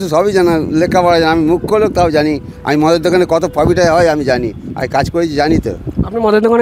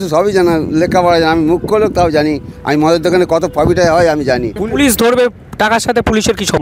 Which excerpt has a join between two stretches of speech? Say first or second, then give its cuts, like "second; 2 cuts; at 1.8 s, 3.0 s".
second; 1 cut; at 4.5 s